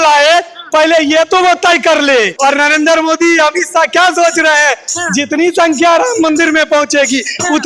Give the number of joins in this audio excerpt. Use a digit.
1